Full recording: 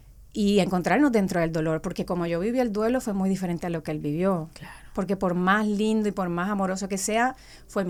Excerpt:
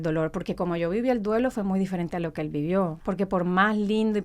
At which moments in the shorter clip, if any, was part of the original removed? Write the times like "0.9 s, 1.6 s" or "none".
3.0 s

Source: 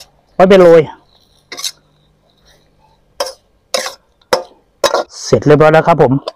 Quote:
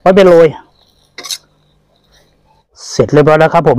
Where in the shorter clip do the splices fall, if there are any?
2.8 s

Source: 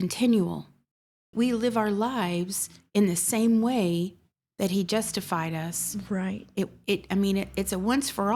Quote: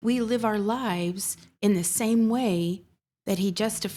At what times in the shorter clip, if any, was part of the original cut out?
none

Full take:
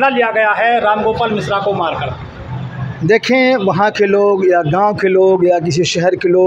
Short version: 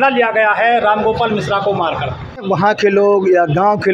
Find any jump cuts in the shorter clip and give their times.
2.4 s

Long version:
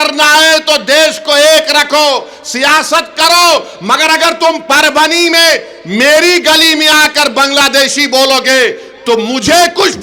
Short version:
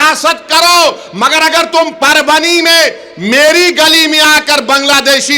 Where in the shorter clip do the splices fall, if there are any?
none

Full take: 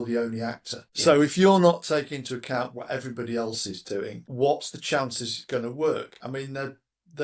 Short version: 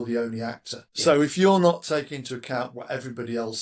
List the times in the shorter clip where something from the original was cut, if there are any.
none

